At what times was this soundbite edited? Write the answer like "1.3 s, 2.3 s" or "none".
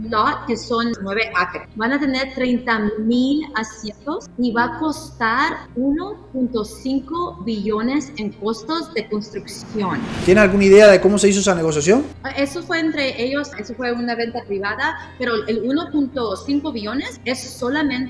0.9 s, 10.2 s